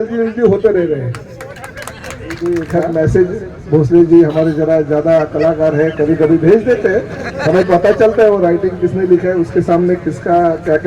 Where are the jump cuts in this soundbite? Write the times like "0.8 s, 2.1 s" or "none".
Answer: 2.4 s

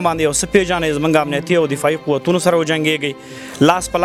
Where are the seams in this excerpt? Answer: none

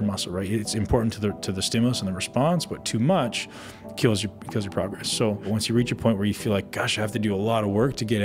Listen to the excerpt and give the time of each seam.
5.5 s

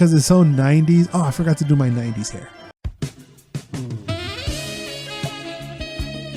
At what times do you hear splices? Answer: none

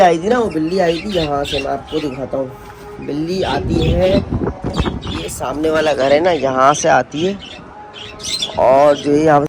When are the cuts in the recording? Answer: none

